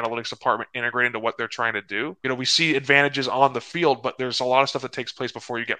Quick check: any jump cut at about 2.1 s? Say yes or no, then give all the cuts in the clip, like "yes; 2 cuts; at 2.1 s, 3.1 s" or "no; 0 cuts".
yes; 1 cut; at 2.1 s